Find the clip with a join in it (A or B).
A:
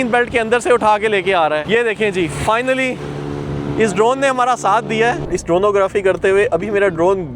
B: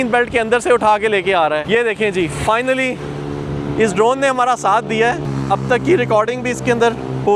A